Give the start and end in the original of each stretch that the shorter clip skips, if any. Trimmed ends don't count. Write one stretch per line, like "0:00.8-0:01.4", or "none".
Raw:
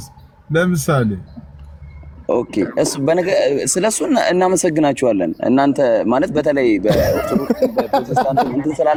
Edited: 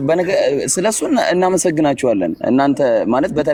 none